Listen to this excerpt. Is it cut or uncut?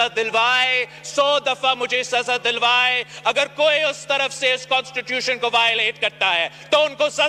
uncut